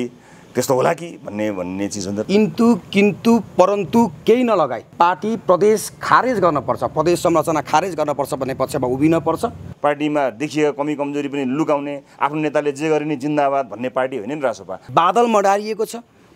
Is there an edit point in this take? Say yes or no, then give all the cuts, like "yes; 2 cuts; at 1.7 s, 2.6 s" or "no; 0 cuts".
yes; 3 cuts; at 2.2 s, 9.6 s, 14.7 s